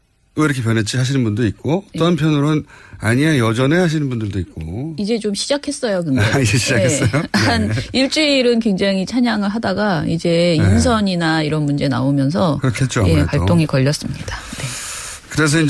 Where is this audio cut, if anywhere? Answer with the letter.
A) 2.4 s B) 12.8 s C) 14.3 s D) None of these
C